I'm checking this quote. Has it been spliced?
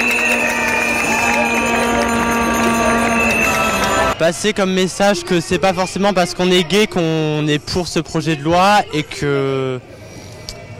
yes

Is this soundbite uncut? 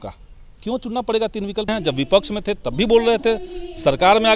no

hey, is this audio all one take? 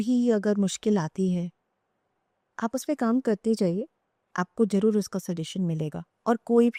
yes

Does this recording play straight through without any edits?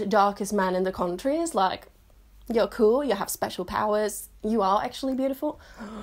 yes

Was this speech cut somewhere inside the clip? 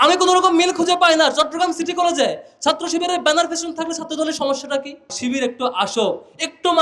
yes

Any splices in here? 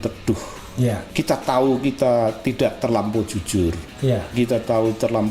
yes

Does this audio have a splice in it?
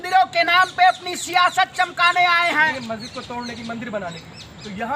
yes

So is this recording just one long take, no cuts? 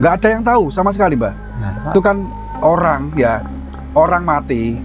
no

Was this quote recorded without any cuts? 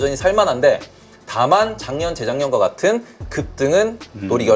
yes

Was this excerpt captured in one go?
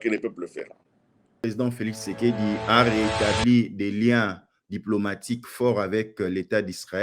no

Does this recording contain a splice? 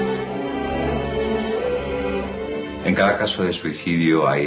yes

